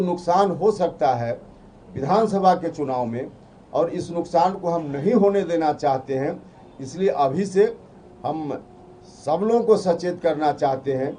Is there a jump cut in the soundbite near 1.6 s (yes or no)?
no